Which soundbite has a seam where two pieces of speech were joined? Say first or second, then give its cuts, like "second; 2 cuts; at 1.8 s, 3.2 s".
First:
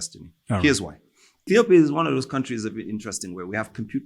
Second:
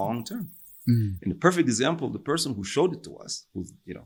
first; 1 cut; at 1.5 s